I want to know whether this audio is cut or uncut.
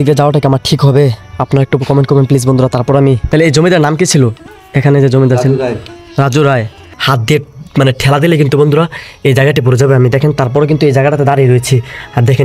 cut